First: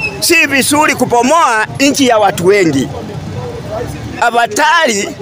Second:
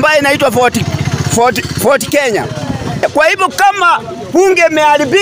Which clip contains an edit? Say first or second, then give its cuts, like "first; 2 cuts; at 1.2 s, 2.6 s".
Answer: second; 1 cut; at 3.0 s